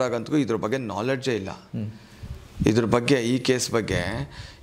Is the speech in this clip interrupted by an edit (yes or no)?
no